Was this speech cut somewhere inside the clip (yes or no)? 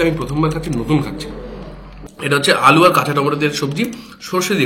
no